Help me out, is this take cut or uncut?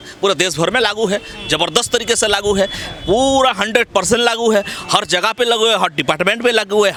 uncut